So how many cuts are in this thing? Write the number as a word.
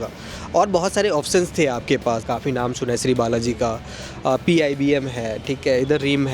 one